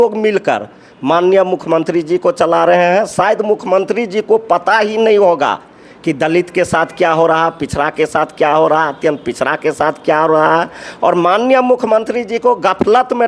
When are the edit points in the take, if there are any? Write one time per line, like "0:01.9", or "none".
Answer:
none